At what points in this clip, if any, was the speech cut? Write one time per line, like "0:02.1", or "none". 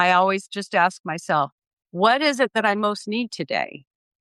none